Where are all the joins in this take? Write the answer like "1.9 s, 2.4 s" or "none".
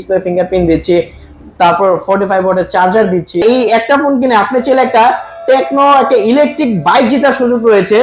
3.4 s